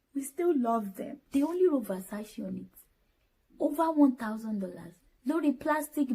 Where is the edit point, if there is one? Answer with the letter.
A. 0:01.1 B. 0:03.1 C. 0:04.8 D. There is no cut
A